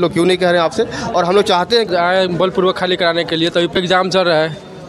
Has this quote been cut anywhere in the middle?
yes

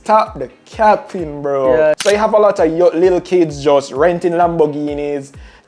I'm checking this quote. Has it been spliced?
yes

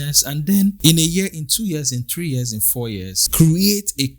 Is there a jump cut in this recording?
yes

